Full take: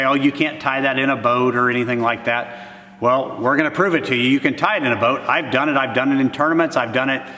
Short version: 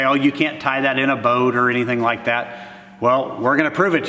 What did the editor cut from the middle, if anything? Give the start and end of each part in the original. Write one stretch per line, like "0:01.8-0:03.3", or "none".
none